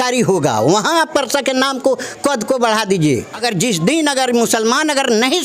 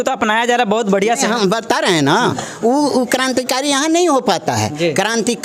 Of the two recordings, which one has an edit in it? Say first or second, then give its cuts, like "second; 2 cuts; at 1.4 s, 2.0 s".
first; 1 cut; at 3.4 s